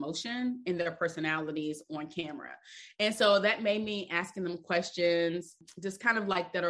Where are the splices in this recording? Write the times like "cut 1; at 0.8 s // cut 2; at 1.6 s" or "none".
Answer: cut 1; at 5.6 s